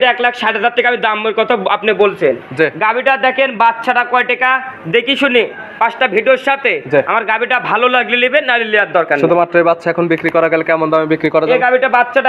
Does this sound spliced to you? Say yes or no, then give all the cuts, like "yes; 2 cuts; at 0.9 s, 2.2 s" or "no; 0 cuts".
no; 0 cuts